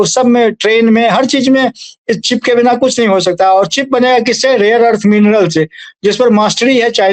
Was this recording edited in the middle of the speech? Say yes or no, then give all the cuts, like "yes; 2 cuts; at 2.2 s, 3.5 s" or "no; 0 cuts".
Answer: no; 0 cuts